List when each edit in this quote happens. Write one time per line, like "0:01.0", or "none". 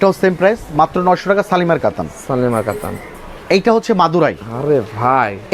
none

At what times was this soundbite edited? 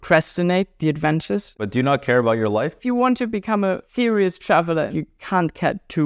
0:01.5
0:02.8
0:03.9
0:04.9

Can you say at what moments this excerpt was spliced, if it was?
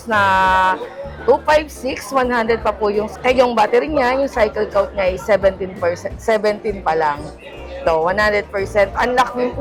none

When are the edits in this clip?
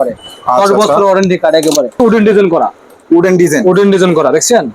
0:02.0

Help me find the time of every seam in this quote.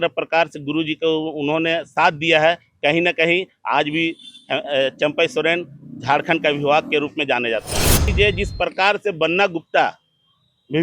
0:08.1

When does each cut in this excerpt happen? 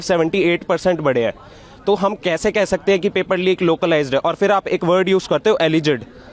none

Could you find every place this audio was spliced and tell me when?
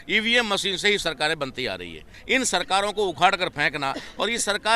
0:02.1

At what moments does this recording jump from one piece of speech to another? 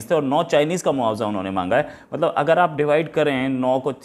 none

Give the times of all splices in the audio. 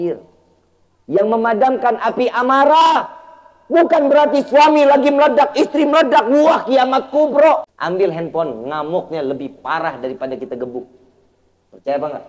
0:07.7

